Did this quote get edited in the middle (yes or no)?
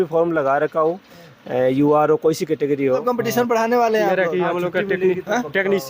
yes